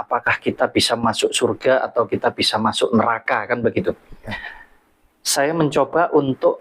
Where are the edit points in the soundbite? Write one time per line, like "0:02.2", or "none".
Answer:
none

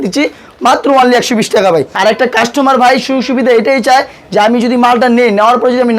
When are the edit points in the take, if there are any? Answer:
0:01.9

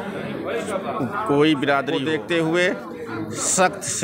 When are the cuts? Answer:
0:02.0

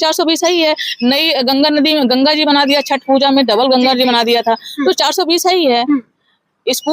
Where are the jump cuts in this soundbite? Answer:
none

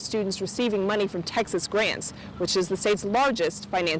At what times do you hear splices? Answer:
none

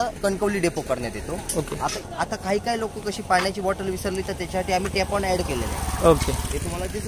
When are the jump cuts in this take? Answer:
0:02.0

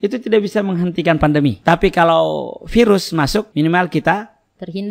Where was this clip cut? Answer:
0:01.6
0:03.5

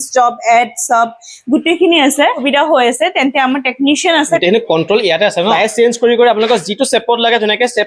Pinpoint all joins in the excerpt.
0:02.4
0:04.4
0:05.5

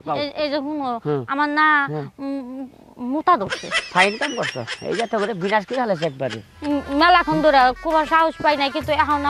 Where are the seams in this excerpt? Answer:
none

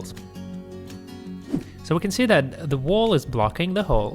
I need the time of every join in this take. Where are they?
0:01.5

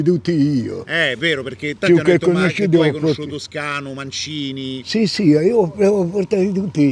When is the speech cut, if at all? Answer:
none

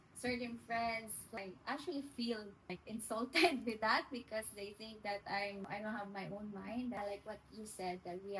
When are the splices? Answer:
0:01.4
0:02.8
0:05.7
0:07.0

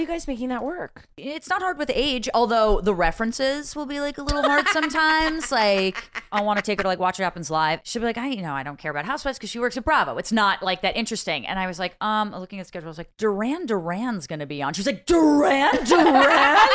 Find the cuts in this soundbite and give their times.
0:01.0
0:06.3
0:07.8

